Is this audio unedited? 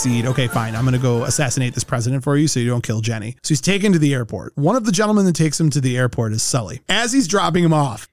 no; 2 cuts; at 3.3 s, 6.9 s

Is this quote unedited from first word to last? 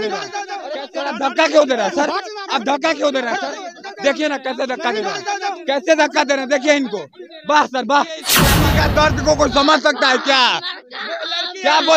no; 2 cuts; at 0.8 s, 8.4 s

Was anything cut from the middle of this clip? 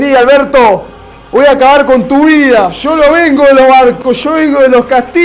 yes; 1 cut; at 2.8 s

